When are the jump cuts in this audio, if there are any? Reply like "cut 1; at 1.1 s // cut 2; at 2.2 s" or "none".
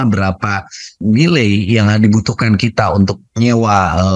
cut 1; at 1.0 s // cut 2; at 3.2 s